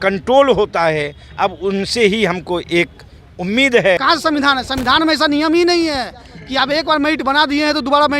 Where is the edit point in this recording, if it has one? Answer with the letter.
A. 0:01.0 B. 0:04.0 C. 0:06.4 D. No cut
B